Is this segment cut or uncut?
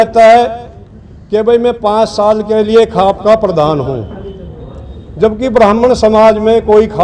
uncut